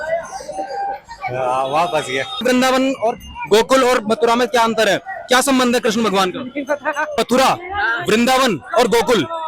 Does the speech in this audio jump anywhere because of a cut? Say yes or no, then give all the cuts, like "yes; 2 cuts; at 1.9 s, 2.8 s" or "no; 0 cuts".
yes; 2 cuts; at 2.4 s, 7.1 s